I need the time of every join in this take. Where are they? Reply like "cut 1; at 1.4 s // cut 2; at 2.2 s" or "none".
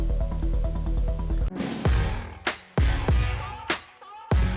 cut 1; at 1.3 s